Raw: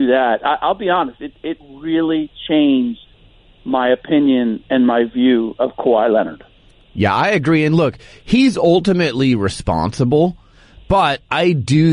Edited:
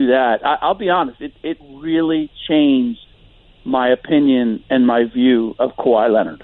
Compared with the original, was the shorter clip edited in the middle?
no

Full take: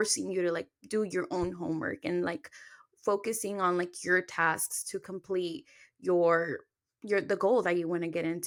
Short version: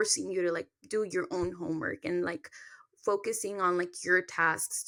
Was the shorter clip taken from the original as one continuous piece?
yes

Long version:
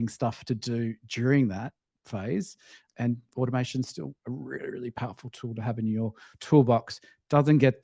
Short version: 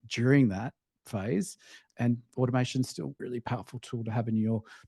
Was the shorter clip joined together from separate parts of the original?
yes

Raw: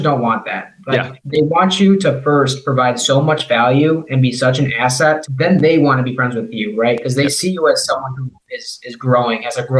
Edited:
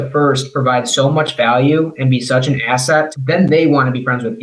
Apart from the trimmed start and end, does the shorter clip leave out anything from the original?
no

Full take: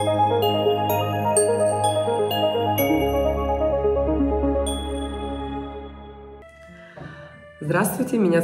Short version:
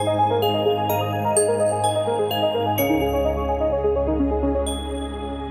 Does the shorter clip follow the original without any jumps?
yes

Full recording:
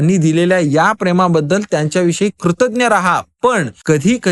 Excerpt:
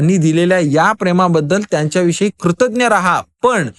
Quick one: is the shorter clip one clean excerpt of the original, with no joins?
yes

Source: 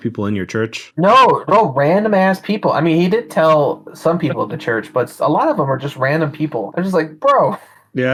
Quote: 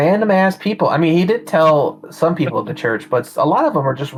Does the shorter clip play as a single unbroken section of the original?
yes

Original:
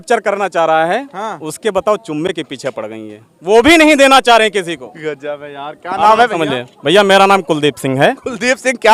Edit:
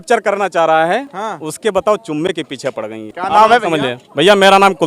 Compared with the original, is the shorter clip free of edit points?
no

